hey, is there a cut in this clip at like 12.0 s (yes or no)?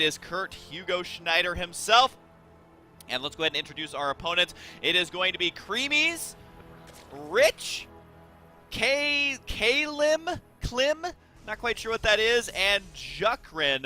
no